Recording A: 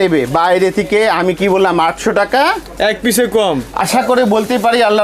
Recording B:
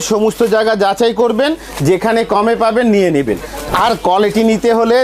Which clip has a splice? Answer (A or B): A